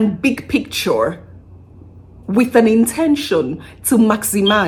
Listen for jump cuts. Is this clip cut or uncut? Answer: uncut